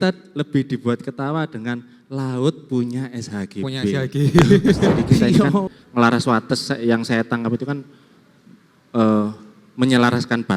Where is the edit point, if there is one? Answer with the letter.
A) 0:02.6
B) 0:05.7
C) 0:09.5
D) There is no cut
B